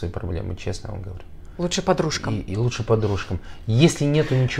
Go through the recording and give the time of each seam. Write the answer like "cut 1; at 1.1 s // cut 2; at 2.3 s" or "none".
none

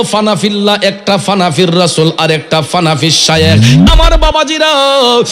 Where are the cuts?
cut 1; at 3.7 s

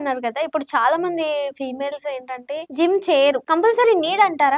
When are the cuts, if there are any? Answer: cut 1; at 2.7 s // cut 2; at 3.4 s

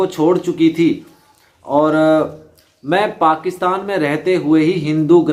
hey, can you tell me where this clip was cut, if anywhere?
none

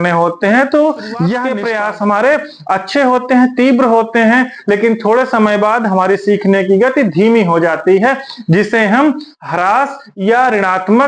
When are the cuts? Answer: cut 1; at 1.5 s

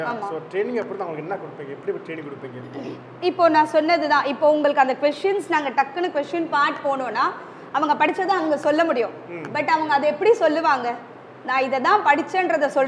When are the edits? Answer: none

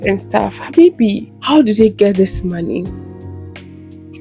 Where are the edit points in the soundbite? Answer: cut 1; at 1.3 s

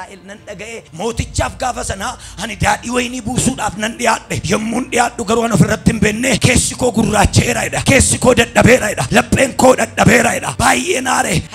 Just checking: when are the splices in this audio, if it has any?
cut 1; at 0.9 s // cut 2; at 4.3 s // cut 3; at 6.4 s // cut 4; at 7.7 s // cut 5; at 9.0 s // cut 6; at 10.5 s

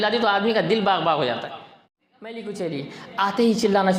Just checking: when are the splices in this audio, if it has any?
cut 1; at 1.8 s

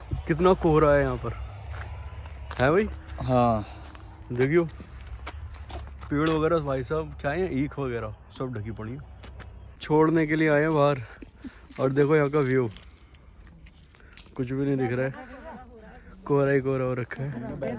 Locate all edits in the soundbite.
cut 1; at 9.8 s

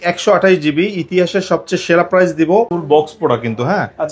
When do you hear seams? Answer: cut 1; at 2.8 s

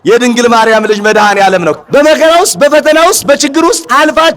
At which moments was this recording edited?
cut 1; at 1.8 s

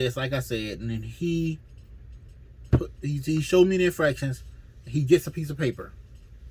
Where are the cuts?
none

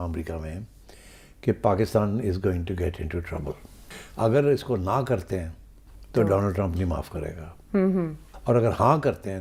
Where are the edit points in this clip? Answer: none

